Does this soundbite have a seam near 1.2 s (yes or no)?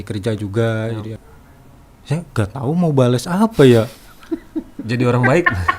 yes